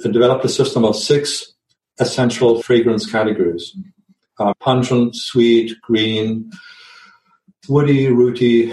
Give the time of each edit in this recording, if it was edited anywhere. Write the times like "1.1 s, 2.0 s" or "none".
none

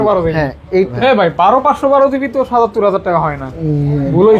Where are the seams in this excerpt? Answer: 0.9 s

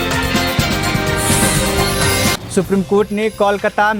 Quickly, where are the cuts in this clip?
none

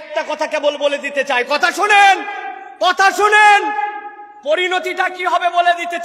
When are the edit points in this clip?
none

